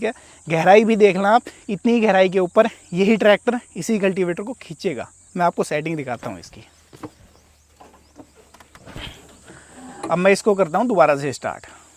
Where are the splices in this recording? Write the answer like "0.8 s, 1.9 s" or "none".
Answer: none